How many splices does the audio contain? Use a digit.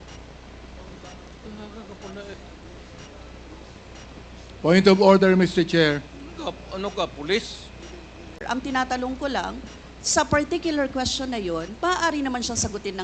1